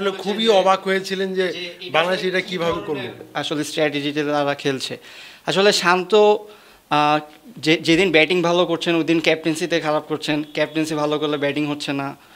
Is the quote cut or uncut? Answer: uncut